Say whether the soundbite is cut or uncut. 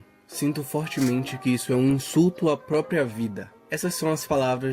cut